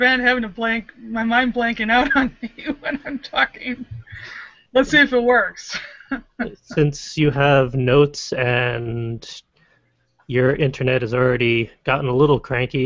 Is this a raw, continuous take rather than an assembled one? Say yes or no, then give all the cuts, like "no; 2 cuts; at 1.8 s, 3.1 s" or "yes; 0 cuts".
no; 1 cut; at 5.8 s